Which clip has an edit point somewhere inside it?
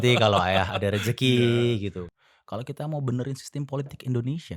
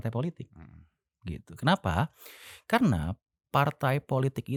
first; 1 cut; at 2.0 s

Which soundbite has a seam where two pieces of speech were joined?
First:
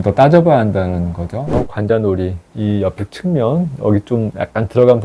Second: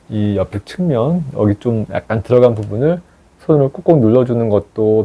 first; 1 cut; at 1.5 s

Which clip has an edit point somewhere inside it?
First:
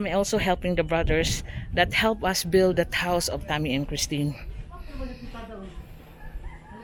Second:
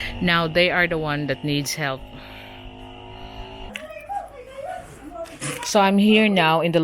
second; 1 cut; at 3.7 s

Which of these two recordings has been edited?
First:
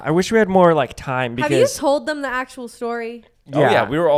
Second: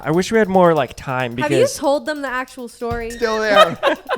second; 1 cut; at 3.1 s

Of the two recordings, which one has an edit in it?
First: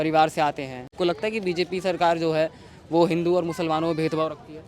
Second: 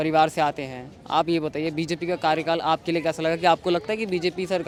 first; 1 cut; at 0.9 s

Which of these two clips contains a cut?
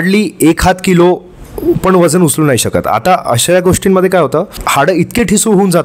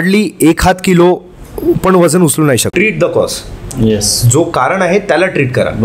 second; 1 cut; at 2.7 s

